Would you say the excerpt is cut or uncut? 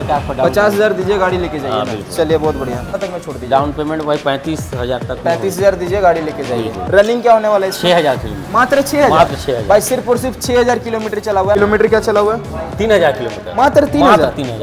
cut